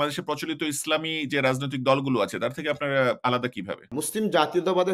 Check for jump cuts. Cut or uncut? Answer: cut